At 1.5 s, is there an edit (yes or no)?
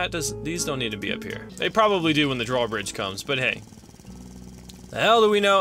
yes